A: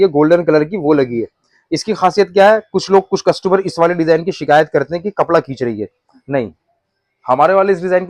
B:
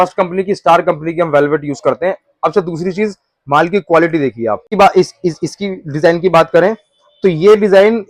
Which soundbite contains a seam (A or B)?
B